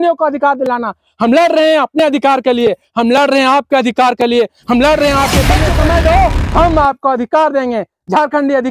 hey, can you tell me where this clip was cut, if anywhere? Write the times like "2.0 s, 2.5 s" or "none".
5.6 s